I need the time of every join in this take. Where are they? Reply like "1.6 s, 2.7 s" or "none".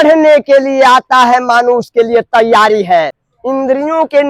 3.3 s